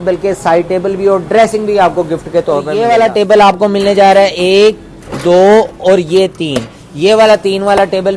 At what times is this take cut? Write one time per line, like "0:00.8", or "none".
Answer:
0:02.7

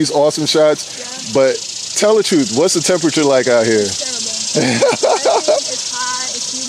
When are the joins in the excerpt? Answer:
none

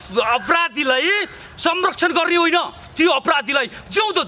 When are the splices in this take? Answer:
none

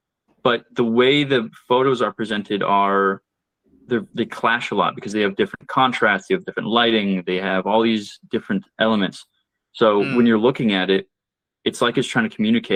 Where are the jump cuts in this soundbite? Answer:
none

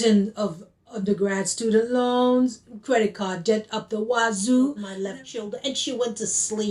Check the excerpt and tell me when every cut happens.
0:04.9

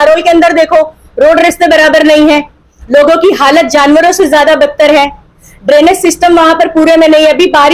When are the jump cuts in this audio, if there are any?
none

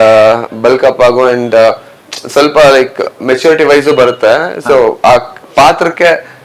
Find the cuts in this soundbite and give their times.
none

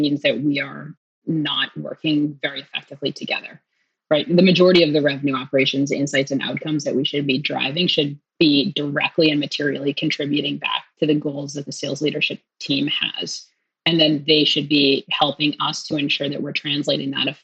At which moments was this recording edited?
0:08.3

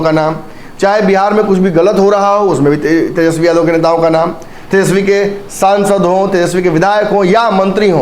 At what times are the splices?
none

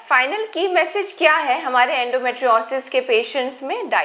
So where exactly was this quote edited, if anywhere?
none

